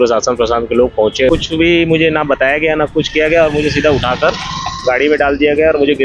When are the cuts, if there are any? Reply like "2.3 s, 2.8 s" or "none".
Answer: 1.3 s